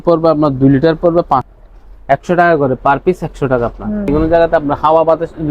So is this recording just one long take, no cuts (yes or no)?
no